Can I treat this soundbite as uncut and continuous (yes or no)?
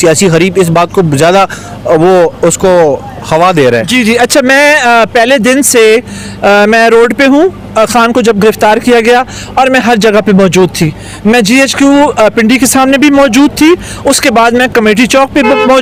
yes